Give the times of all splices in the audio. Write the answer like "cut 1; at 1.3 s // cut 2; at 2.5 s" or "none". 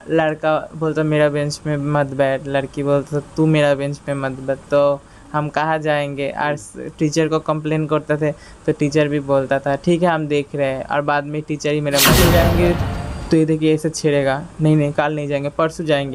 cut 1; at 12.2 s